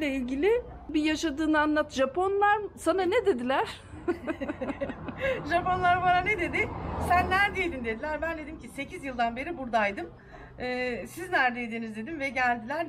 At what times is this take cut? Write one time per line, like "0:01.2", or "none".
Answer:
0:00.9

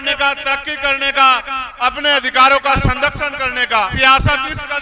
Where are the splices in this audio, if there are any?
0:03.9

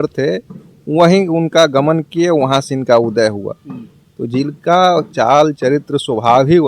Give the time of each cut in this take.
none

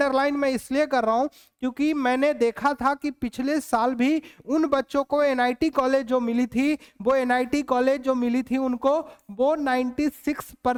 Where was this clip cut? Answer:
none

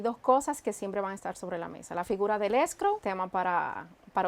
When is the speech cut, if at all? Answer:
0:03.0

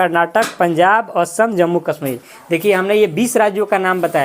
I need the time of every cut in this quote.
none

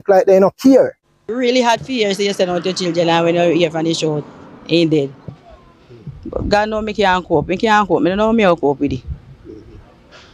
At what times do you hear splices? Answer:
0:01.1

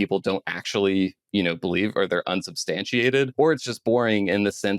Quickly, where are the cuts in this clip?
0:03.3

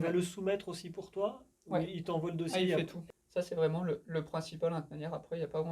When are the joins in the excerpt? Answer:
0:03.0

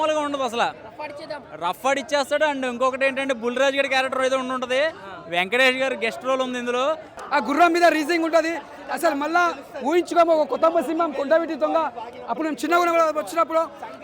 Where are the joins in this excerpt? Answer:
0:07.2

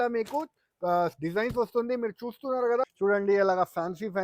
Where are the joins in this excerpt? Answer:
0:02.8

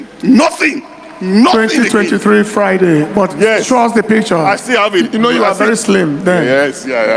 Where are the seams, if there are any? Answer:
none

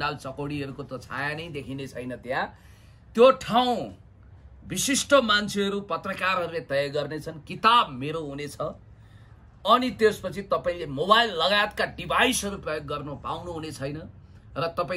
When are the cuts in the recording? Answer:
none

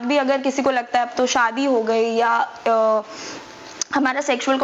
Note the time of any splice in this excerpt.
none

